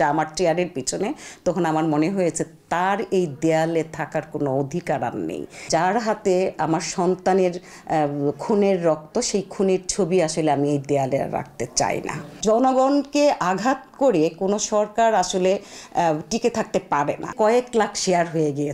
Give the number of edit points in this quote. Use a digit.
3